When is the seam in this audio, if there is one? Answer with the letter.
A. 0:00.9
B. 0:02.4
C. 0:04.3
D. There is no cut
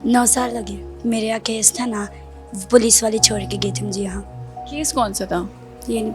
A